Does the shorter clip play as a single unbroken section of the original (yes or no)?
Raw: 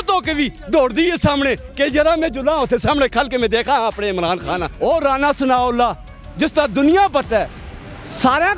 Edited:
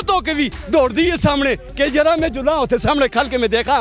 yes